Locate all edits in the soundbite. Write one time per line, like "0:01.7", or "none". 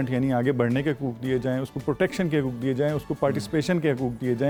none